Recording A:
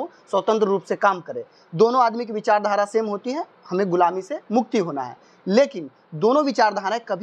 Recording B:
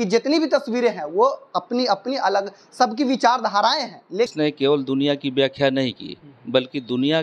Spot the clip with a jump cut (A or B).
B